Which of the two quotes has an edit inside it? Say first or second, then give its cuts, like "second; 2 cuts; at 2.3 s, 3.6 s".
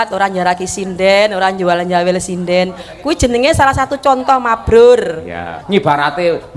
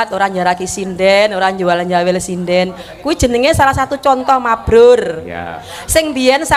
first; 1 cut; at 5.6 s